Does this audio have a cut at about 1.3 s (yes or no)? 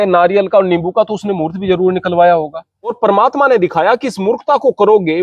no